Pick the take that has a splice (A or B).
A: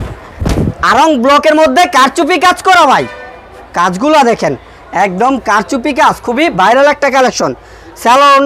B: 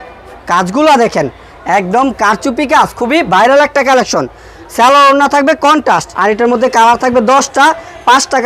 B